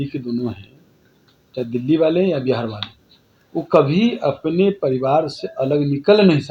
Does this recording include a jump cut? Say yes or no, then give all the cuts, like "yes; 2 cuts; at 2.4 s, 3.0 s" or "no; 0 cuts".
no; 0 cuts